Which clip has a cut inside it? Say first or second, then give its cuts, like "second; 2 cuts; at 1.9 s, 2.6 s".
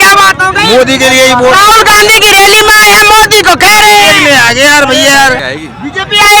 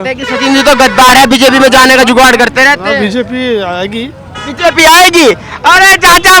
first; 1 cut; at 5.4 s